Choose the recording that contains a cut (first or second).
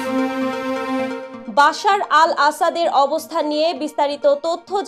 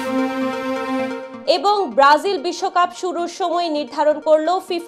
first